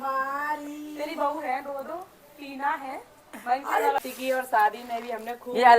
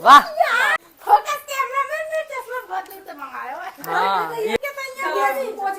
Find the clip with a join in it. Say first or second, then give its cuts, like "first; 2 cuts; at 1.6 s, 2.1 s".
first; 1 cut; at 4.0 s